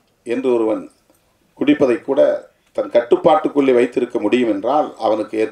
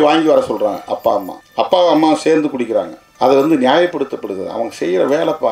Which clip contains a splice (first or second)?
second